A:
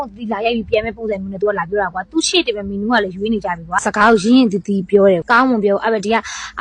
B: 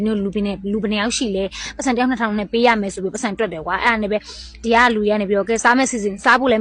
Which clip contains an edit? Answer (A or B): A